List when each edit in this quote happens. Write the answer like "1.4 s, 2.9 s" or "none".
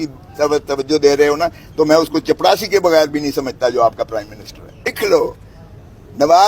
5.0 s